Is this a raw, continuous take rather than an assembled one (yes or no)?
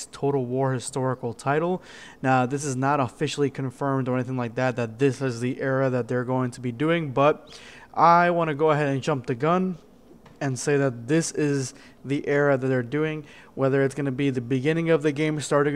no